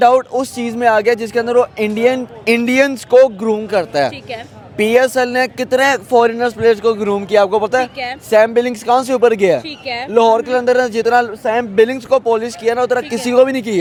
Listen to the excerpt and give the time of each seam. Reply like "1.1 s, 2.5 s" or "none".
none